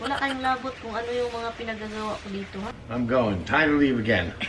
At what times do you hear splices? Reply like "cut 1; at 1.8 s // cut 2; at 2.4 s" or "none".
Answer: cut 1; at 2.8 s